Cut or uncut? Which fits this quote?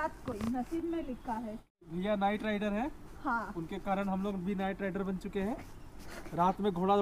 cut